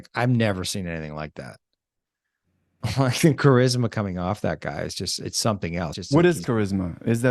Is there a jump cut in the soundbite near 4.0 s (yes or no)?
no